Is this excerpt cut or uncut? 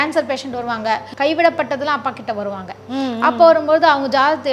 cut